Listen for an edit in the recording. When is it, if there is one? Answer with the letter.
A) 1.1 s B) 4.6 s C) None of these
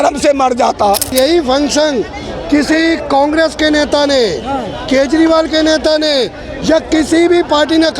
A